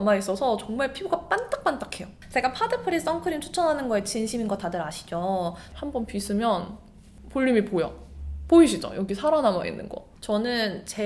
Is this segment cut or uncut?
cut